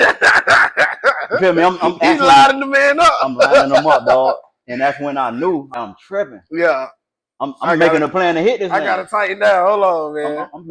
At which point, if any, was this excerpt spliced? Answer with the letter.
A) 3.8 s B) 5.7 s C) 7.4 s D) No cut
B